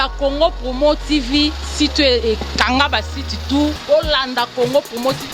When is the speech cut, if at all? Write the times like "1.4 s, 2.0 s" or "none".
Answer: 3.8 s